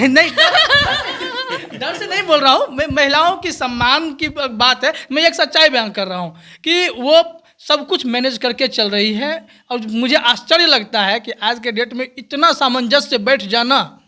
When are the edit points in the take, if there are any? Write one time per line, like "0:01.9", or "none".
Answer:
none